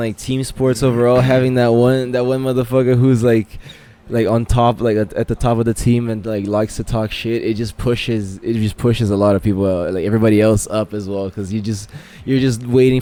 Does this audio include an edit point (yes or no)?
no